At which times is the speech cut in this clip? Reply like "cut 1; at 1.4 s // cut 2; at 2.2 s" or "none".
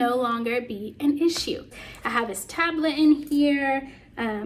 cut 1; at 1.7 s